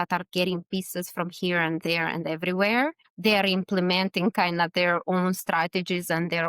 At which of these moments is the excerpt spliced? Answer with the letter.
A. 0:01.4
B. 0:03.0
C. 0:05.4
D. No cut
B